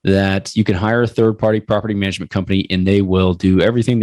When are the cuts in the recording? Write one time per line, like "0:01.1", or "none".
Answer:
none